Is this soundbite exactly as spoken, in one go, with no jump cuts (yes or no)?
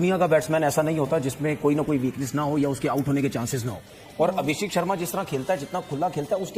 yes